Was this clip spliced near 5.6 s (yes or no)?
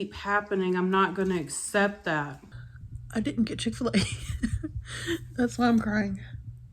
no